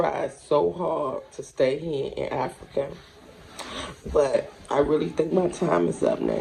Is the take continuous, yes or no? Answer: yes